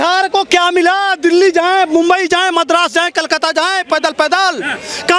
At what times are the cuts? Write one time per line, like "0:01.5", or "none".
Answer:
none